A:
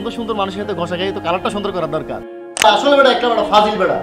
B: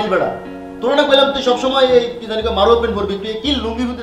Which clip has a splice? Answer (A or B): A